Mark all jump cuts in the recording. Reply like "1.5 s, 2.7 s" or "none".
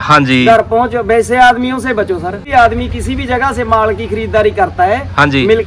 2.4 s